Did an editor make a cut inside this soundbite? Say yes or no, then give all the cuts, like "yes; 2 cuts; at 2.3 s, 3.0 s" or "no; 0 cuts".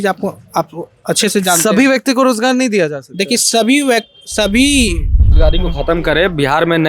yes; 1 cut; at 5.4 s